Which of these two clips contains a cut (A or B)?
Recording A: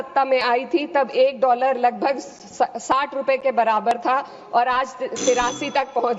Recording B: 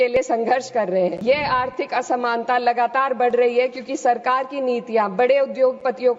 B